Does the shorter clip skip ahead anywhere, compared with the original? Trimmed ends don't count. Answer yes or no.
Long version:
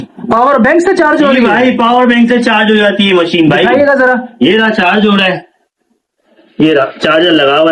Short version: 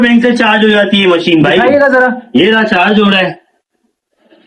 no